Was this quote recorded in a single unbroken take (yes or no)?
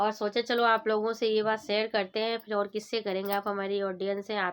yes